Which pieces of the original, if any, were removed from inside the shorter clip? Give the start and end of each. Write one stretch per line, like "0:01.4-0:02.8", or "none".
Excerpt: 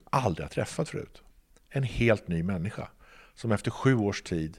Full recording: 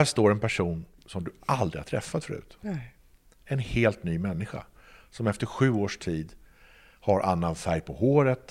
0:02.5-0:02.9